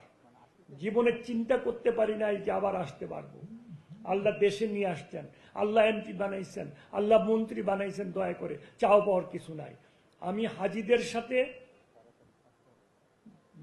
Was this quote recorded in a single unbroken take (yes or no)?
yes